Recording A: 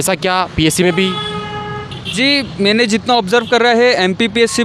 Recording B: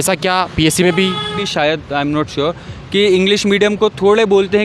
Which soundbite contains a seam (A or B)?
B